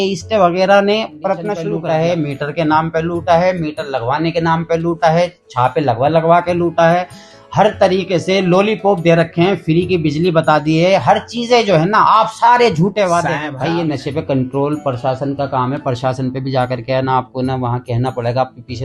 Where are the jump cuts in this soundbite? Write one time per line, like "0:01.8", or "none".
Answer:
0:01.6
0:13.5